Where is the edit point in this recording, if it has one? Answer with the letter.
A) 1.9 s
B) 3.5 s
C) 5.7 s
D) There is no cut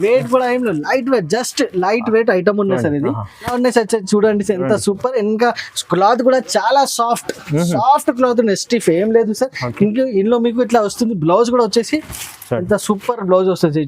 B